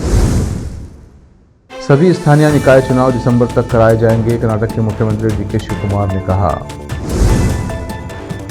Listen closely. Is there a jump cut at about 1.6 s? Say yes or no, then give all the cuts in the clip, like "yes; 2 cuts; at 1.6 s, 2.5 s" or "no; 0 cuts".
yes; 1 cut; at 1.6 s